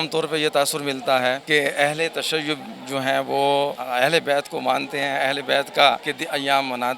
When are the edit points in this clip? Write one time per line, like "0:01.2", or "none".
0:01.4
0:03.8
0:06.1